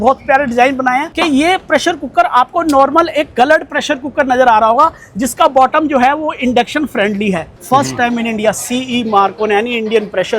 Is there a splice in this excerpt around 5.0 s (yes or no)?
no